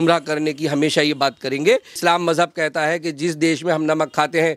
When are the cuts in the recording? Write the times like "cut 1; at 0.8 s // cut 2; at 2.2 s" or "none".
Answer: cut 1; at 2.0 s